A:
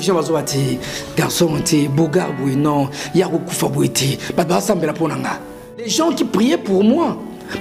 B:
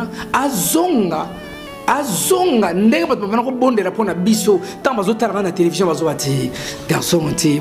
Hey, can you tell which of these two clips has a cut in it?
A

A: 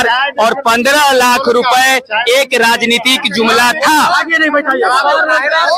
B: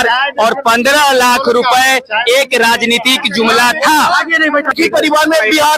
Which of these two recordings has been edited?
B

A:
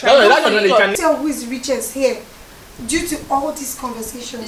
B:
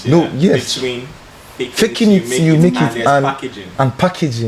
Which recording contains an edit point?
A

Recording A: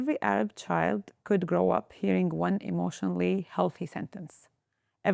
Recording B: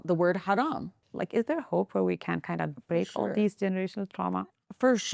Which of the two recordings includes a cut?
B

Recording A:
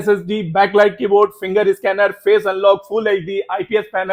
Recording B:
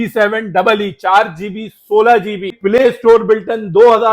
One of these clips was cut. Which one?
B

